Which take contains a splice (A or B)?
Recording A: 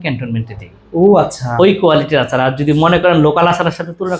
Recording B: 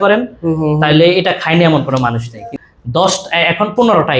B